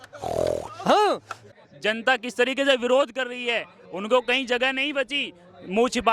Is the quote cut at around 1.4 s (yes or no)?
yes